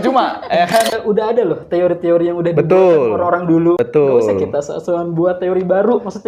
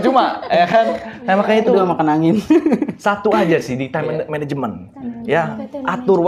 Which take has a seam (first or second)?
first